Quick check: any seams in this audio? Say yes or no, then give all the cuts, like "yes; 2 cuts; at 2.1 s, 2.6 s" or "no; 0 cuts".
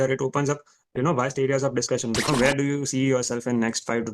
yes; 1 cut; at 2.3 s